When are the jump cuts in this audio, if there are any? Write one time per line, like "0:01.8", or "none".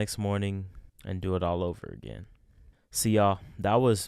none